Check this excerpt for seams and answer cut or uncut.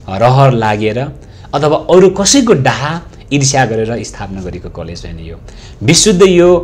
uncut